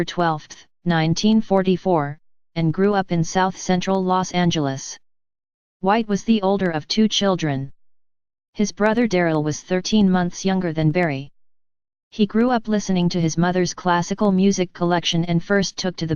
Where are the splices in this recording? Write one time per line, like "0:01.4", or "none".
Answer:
0:14.6